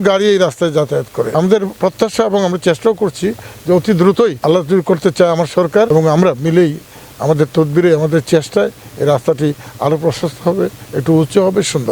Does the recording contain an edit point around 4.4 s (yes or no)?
yes